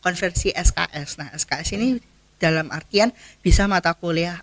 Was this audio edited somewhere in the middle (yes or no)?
no